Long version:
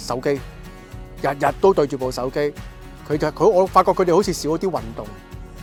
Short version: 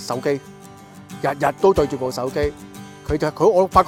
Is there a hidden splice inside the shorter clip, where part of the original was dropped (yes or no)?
no